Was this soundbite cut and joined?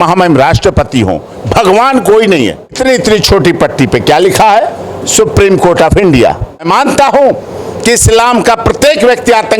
yes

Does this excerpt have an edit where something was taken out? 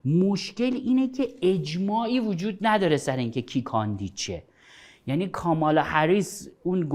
no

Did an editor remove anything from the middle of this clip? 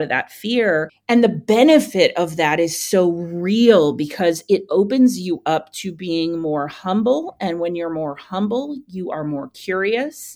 yes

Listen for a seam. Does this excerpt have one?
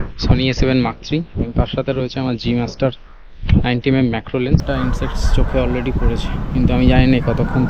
yes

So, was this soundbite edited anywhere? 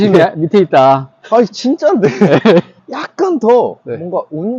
yes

